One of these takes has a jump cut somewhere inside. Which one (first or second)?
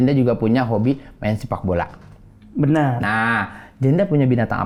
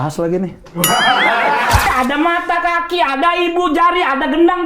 second